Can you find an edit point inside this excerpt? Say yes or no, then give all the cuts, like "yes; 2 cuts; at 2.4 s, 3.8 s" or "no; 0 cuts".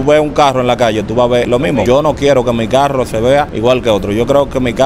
yes; 2 cuts; at 1.6 s, 3.5 s